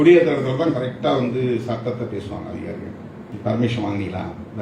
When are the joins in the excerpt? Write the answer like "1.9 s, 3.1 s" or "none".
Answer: 3.3 s